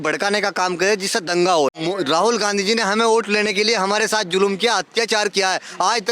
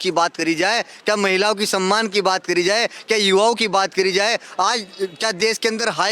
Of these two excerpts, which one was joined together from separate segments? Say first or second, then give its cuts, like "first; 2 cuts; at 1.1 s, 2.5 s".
first; 1 cut; at 1.8 s